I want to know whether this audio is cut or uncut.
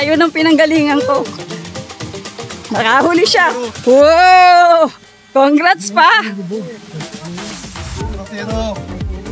uncut